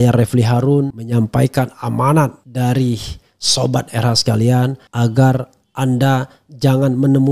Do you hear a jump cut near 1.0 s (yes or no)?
yes